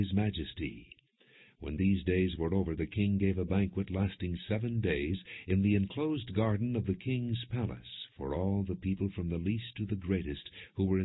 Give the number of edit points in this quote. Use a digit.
1